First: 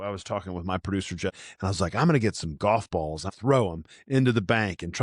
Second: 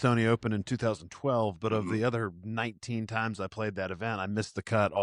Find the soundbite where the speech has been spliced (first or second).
first